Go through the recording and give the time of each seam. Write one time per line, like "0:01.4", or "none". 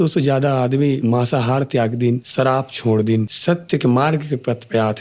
0:01.0
0:02.3
0:03.3